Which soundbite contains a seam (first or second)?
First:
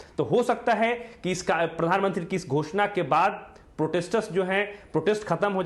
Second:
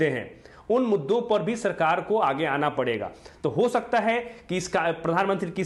first